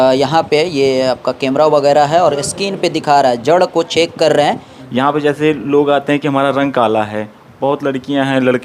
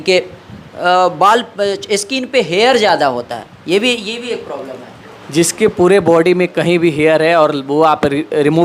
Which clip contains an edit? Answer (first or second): first